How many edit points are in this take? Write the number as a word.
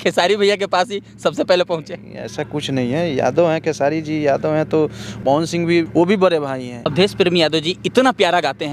three